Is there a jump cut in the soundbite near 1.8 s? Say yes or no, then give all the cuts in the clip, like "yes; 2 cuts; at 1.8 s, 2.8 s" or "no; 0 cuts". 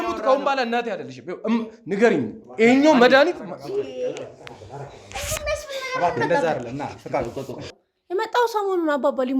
no; 1 cut; at 7.7 s